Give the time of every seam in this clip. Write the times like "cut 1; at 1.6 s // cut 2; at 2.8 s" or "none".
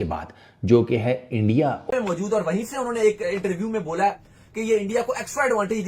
cut 1; at 1.9 s